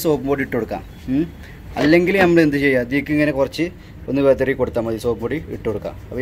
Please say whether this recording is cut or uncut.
uncut